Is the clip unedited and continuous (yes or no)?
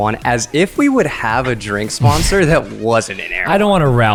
yes